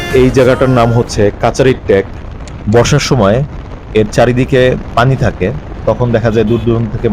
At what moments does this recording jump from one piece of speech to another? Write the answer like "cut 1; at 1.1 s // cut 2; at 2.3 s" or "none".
none